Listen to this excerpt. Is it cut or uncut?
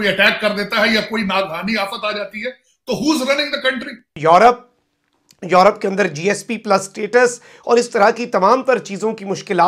cut